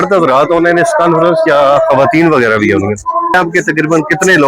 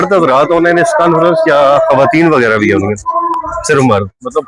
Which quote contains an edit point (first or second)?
first